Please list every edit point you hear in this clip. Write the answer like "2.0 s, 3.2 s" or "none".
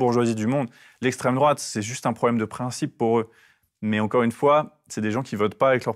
none